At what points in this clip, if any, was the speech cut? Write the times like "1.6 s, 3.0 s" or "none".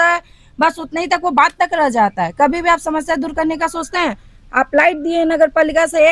none